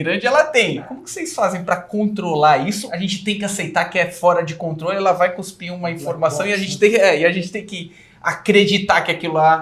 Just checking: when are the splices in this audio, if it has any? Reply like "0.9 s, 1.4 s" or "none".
1.0 s, 2.8 s